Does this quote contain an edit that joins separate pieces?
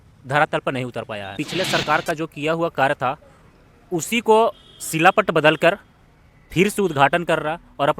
yes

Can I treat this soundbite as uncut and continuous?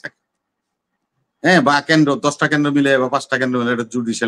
yes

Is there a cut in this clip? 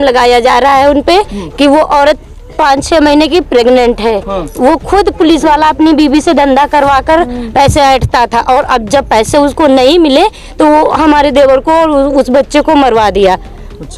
no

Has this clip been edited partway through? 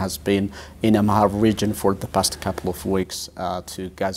no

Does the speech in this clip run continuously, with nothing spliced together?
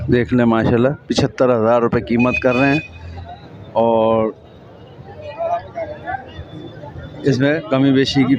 yes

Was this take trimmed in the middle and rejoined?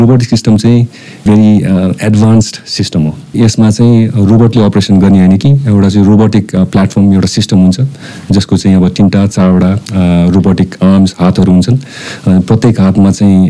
yes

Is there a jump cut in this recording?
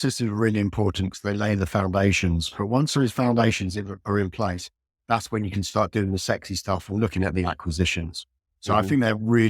no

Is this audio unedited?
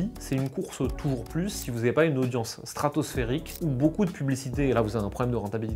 yes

